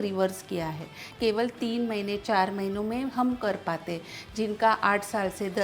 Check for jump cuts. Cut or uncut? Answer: cut